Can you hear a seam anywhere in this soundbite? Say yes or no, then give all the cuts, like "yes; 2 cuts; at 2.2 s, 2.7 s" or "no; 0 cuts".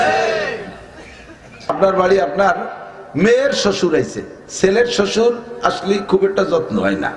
yes; 1 cut; at 1.7 s